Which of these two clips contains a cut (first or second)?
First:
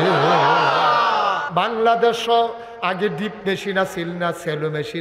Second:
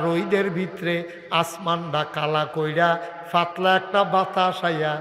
first